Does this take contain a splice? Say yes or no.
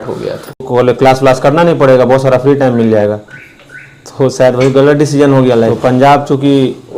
yes